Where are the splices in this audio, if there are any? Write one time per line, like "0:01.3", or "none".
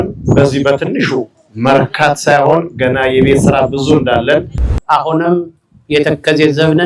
0:04.7